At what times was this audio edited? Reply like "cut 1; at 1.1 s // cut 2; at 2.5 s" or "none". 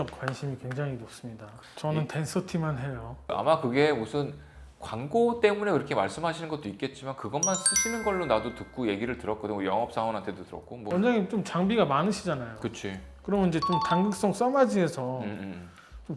cut 1; at 10.9 s